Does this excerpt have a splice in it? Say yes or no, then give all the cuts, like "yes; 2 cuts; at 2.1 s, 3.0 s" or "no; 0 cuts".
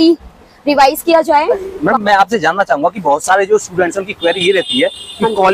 yes; 1 cut; at 1.7 s